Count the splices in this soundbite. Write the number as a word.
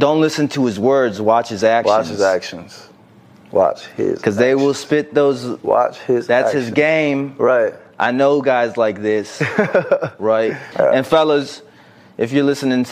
one